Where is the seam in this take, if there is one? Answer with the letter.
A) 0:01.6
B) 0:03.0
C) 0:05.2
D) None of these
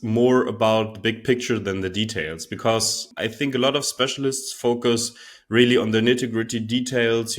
B